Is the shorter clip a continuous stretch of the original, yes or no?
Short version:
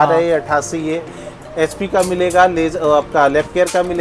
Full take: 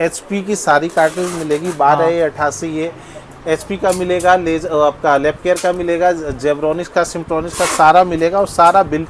yes